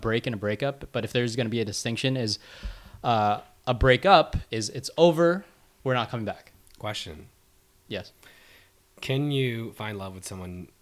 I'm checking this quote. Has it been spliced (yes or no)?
no